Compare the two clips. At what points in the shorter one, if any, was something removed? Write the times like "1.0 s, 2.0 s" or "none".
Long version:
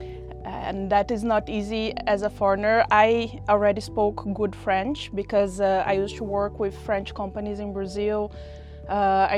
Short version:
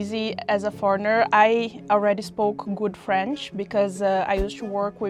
none